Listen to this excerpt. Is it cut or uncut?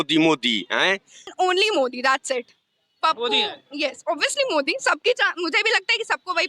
cut